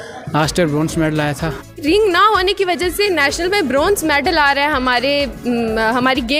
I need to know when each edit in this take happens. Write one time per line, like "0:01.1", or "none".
0:01.8